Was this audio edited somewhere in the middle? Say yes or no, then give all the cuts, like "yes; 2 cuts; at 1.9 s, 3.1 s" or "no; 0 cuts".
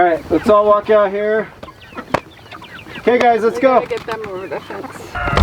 no; 0 cuts